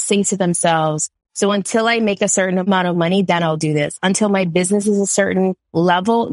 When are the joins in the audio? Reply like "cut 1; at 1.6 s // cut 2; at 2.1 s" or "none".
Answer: cut 1; at 2.7 s